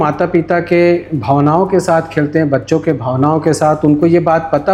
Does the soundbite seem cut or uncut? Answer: uncut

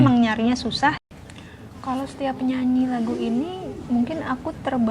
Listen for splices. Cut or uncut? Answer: cut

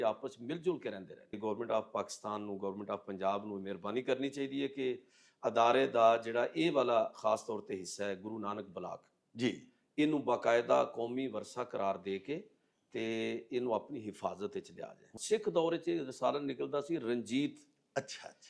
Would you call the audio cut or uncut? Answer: cut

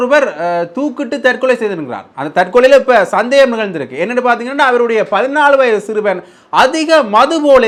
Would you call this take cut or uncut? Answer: uncut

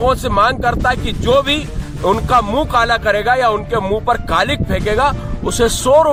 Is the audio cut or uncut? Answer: uncut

